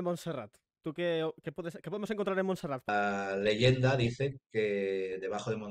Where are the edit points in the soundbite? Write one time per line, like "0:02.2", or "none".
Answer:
0:02.9